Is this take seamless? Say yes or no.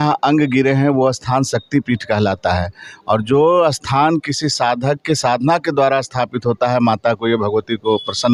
yes